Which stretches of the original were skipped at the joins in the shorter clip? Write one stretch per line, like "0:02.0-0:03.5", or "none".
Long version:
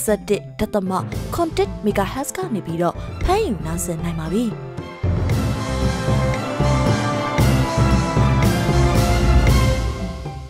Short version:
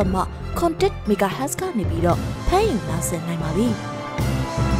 0:04.6-0:07.0